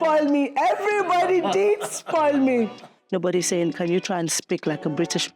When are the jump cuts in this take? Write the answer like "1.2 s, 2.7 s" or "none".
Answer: 3.0 s